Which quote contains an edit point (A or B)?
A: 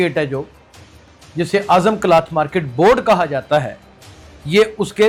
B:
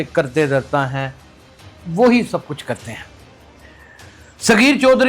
B